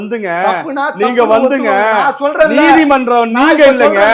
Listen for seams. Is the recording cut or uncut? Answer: uncut